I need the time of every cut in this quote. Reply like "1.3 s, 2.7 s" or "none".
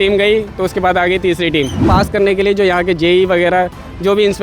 1.8 s